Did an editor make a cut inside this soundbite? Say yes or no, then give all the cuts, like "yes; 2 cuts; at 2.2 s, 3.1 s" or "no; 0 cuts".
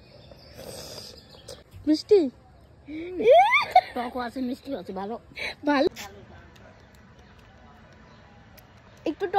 yes; 2 cuts; at 1.6 s, 5.9 s